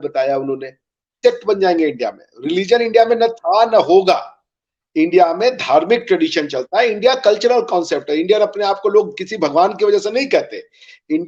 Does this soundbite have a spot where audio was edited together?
yes; 1 cut; at 1.2 s

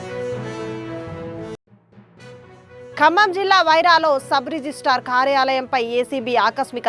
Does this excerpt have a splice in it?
yes; 1 cut; at 1.5 s

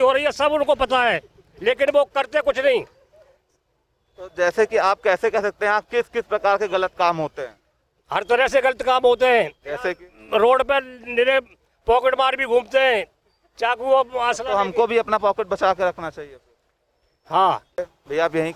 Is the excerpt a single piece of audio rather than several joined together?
yes; 0 cuts

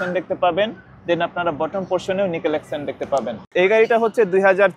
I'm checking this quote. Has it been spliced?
yes; 1 cut; at 3.4 s

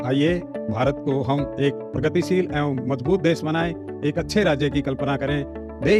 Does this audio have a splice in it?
no; 0 cuts

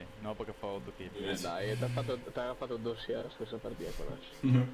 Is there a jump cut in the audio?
yes; 1 cut; at 1.2 s

